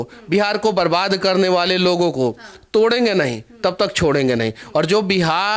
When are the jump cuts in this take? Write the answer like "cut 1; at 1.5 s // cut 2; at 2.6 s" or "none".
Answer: none